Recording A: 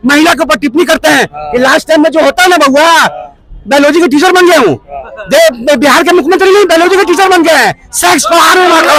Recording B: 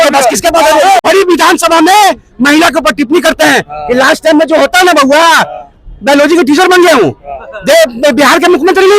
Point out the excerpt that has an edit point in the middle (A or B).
B